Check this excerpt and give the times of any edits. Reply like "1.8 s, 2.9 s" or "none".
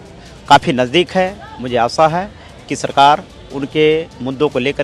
none